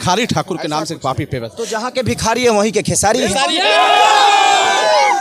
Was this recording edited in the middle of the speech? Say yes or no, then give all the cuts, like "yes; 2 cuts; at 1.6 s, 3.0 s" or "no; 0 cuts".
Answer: no; 0 cuts